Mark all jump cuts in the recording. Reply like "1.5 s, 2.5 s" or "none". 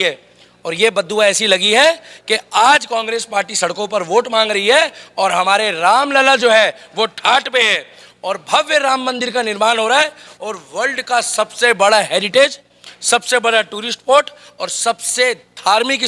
none